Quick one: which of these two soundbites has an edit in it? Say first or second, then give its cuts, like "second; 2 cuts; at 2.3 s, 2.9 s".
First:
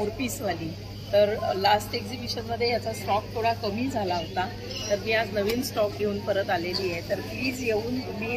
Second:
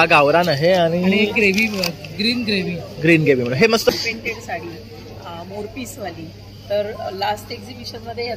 second; 1 cut; at 3.9 s